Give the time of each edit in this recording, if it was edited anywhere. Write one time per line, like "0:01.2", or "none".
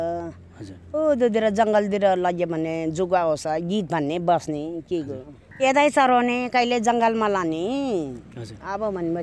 0:05.4